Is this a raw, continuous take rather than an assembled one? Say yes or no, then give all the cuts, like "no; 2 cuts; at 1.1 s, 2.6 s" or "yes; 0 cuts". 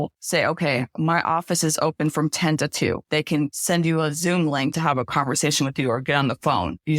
no; 2 cuts; at 3.3 s, 4.8 s